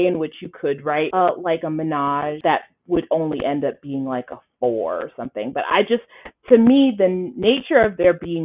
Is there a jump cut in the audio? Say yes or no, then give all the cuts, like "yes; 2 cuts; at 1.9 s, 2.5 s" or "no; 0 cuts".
yes; 2 cuts; at 1.1 s, 2.4 s